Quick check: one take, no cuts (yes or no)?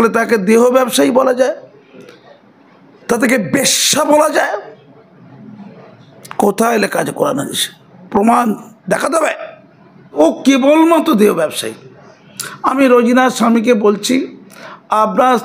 no